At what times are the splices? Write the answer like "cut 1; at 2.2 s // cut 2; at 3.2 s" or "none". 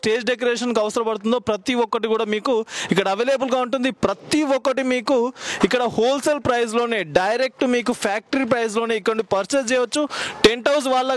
none